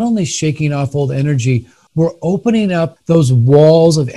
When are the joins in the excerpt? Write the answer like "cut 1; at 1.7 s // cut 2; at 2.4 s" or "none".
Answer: cut 1; at 1.8 s // cut 2; at 3.0 s